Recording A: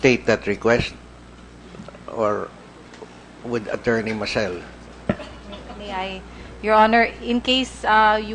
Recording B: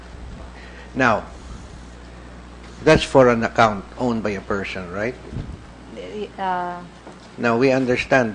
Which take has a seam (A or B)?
A